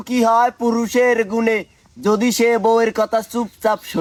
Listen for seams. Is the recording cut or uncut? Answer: uncut